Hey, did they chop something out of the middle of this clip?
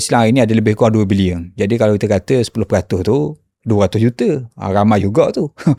no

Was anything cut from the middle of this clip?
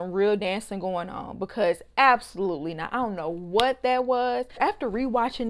yes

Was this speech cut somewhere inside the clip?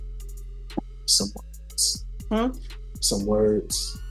no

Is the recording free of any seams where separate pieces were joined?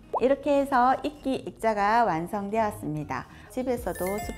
no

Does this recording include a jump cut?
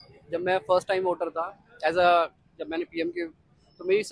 no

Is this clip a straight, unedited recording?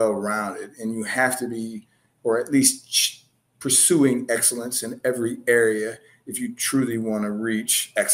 yes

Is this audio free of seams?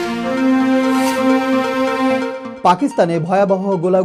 no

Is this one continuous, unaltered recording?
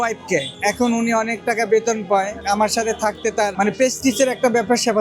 no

